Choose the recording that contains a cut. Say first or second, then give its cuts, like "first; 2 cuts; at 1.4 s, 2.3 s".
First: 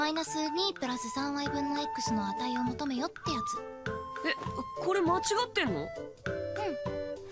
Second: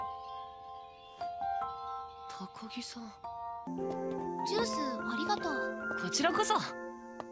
first; 1 cut; at 3.0 s